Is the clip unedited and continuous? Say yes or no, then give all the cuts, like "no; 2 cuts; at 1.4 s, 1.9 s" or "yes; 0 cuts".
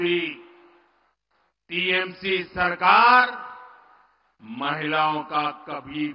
yes; 0 cuts